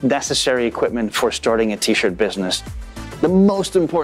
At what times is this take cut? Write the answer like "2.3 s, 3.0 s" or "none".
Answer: 2.6 s